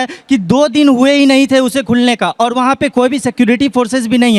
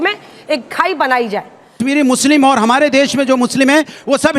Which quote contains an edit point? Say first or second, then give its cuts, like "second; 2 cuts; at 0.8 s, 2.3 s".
second; 1 cut; at 1.8 s